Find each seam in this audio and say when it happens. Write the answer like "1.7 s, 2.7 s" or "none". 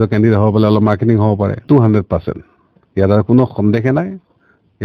1.6 s

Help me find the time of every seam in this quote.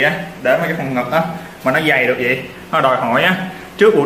none

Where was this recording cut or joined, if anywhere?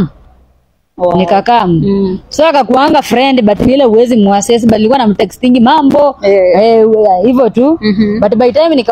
2.5 s

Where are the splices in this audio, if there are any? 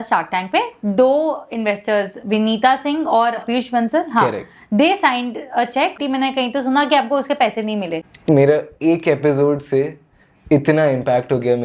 3.4 s, 5.9 s, 8.0 s

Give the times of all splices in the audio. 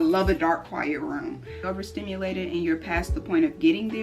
1.6 s

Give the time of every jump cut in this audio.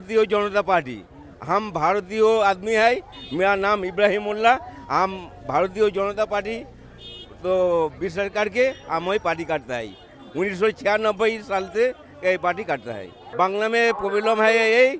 13.2 s

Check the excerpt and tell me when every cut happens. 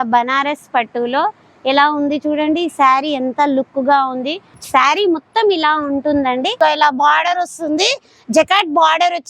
4.5 s, 6.5 s

